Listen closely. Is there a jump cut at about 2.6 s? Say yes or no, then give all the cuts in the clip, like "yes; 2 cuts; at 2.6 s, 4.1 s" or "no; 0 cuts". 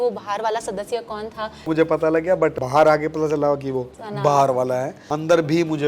yes; 4 cuts; at 1.7 s, 2.6 s, 4.0 s, 5.0 s